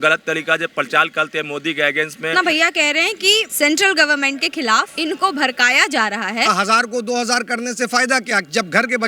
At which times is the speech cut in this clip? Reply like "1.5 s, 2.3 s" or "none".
2.3 s, 3.5 s, 4.9 s, 6.5 s